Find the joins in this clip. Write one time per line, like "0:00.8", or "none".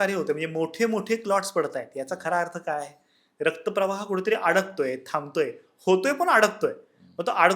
none